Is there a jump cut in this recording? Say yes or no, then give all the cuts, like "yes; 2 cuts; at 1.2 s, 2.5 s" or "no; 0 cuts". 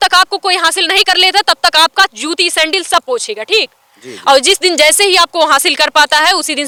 no; 0 cuts